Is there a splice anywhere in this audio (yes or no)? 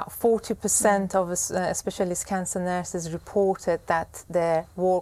no